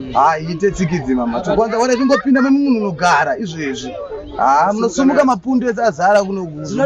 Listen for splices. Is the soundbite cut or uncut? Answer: uncut